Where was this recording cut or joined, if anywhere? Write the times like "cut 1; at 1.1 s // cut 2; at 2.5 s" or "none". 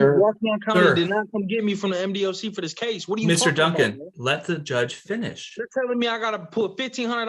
none